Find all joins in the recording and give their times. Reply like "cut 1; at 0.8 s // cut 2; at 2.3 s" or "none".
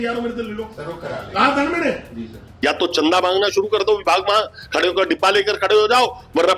cut 1; at 2.4 s